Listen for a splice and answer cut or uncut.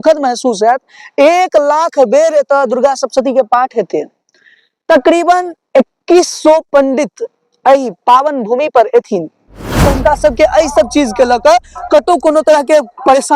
cut